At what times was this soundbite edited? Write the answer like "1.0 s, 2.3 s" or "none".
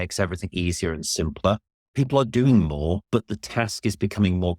1.8 s, 3.0 s